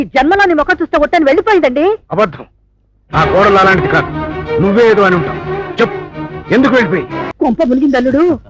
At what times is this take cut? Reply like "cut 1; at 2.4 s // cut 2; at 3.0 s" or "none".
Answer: cut 1; at 7.3 s